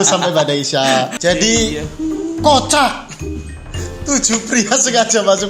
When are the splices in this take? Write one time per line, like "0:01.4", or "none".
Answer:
0:01.1